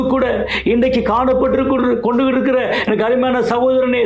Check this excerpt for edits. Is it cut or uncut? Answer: uncut